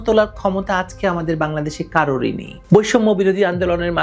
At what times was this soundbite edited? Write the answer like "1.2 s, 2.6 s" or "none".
2.5 s